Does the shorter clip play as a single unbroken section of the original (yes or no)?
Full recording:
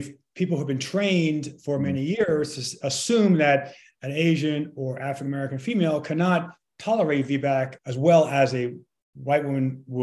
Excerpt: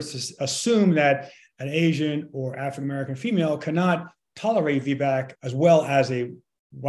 yes